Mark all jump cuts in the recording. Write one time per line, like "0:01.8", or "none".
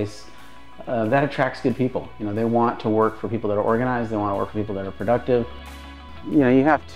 0:06.0